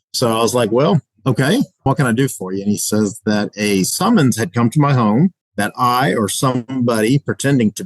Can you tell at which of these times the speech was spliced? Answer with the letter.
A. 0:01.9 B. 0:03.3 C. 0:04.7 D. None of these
A